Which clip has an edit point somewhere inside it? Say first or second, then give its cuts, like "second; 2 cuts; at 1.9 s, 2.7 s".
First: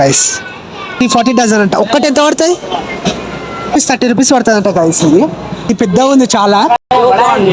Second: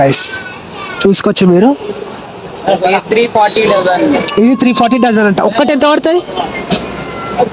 first; 3 cuts; at 1.0 s, 3.7 s, 5.7 s